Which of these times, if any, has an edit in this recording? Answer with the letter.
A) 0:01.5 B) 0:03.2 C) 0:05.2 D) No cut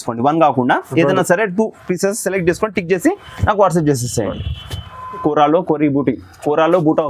C